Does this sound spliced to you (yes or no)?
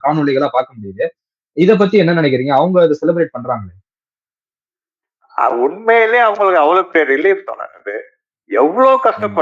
no